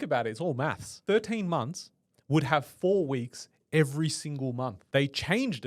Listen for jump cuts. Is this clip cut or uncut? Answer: cut